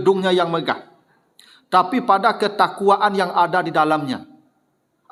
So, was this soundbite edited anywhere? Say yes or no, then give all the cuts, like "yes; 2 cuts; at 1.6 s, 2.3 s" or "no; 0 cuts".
no; 0 cuts